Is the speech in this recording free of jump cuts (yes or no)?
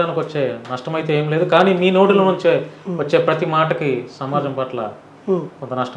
yes